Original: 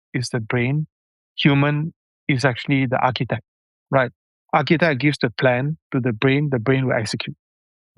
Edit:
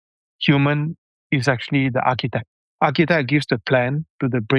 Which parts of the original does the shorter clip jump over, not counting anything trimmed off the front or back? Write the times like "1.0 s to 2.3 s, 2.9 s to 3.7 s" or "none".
3.6 s to 4.3 s